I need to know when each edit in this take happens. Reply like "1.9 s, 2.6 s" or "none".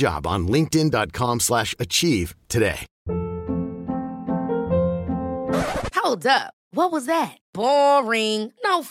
2.9 s